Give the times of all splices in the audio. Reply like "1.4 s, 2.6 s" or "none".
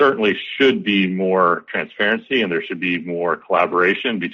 none